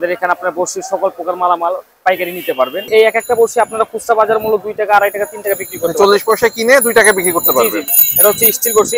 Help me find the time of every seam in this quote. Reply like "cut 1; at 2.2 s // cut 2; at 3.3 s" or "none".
cut 1; at 2.8 s // cut 2; at 7.9 s